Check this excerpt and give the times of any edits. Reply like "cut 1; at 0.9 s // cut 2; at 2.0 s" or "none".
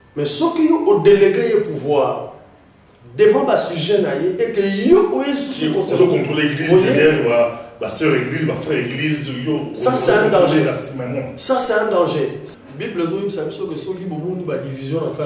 cut 1; at 12.4 s